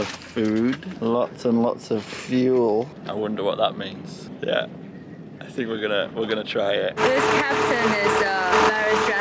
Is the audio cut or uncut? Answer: cut